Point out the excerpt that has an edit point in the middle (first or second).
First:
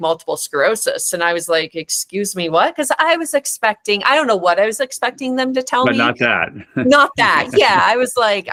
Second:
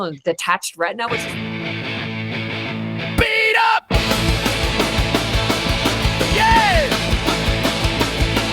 second